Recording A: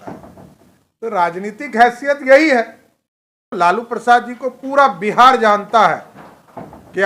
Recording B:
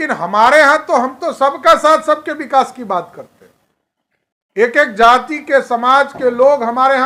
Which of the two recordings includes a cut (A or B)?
A